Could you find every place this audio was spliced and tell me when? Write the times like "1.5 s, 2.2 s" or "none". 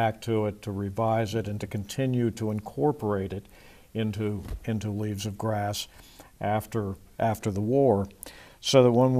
none